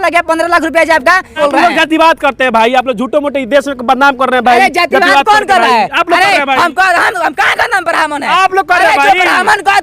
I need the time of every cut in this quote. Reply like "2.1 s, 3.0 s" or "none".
1.4 s